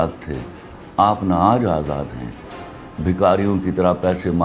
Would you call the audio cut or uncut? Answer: uncut